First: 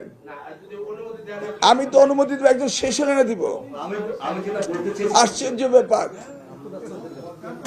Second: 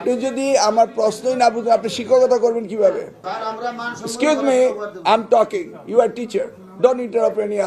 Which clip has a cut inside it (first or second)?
second